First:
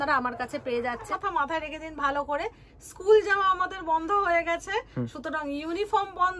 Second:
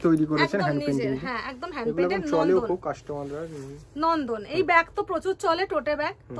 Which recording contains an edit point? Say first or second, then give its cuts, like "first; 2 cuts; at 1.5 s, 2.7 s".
first; 1 cut; at 1.1 s